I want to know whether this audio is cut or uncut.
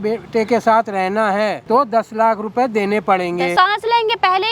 cut